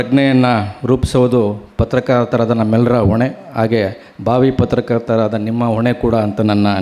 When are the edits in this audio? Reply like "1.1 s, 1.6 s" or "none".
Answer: none

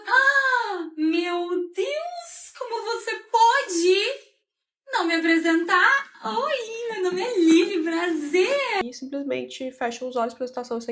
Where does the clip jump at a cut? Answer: 8.8 s

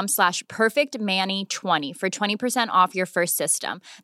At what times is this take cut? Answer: 1.8 s

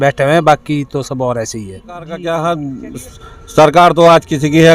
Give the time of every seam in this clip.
2.2 s

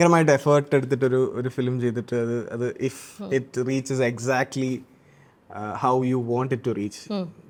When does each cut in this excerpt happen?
none

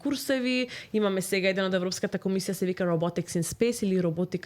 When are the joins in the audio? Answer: none

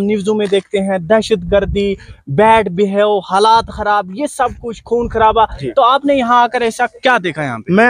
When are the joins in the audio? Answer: 5.6 s

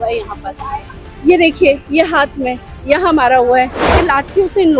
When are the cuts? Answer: 3.8 s

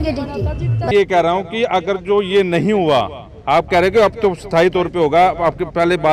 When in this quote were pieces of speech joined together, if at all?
0.9 s

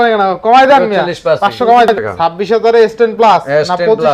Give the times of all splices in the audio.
1.9 s

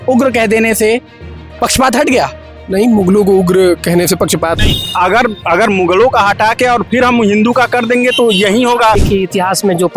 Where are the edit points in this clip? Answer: 4.6 s, 9.0 s

